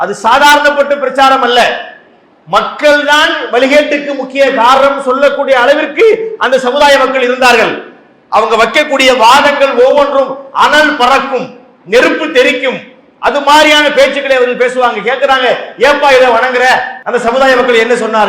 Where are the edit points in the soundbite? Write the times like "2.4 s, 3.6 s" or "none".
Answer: 16.9 s